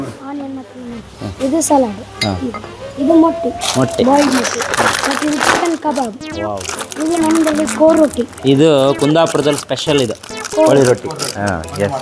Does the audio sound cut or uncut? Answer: uncut